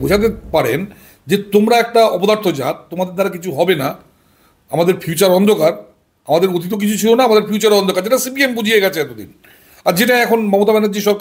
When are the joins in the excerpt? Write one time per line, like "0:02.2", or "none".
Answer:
none